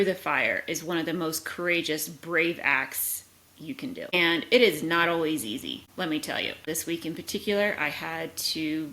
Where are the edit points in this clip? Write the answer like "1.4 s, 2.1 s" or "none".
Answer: 4.1 s, 5.8 s, 6.6 s